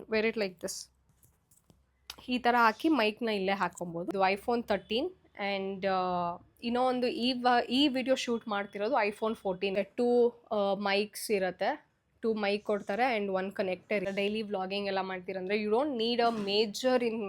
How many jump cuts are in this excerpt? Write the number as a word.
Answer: three